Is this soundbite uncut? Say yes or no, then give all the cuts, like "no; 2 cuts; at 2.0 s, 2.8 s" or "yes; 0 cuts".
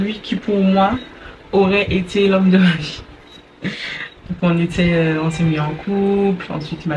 yes; 0 cuts